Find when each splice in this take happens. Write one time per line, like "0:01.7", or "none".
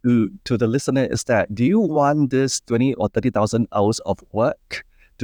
none